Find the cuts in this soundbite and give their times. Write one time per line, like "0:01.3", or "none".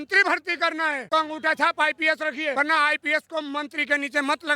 0:01.0
0:02.5